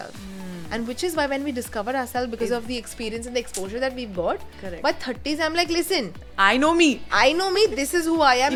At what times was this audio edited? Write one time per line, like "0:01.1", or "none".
none